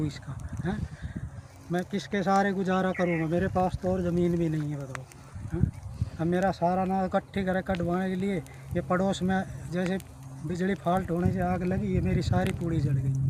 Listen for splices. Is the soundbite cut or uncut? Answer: uncut